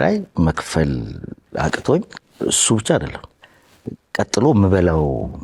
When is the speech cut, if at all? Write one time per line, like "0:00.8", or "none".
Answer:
0:02.2